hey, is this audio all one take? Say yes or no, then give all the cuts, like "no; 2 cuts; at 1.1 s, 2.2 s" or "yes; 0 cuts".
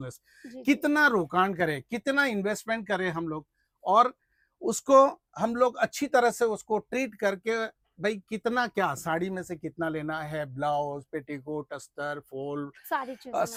yes; 0 cuts